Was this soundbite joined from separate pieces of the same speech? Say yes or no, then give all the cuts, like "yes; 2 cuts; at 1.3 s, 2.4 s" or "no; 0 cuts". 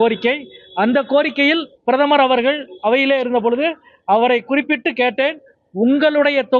no; 0 cuts